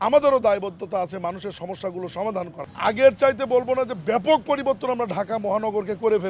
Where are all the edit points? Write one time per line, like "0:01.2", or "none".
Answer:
0:02.7